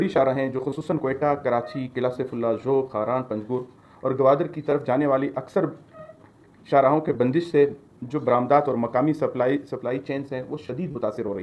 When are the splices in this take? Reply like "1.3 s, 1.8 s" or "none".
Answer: none